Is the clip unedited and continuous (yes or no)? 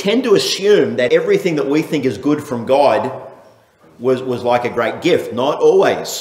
no